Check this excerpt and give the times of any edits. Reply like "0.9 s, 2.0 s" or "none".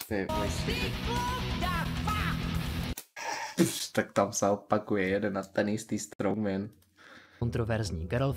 7.4 s